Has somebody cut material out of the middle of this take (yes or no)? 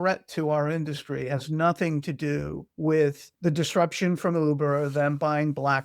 yes